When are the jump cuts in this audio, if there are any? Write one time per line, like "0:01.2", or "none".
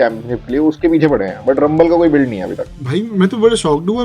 none